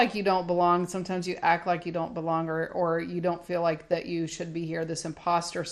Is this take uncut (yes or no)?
yes